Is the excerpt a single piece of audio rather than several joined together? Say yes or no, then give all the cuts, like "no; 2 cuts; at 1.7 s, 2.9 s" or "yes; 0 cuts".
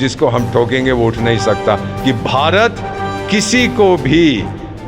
no; 1 cut; at 1.9 s